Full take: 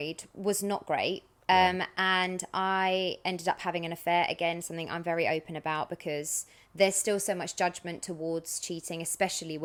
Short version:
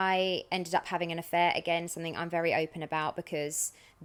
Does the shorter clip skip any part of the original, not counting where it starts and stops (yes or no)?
no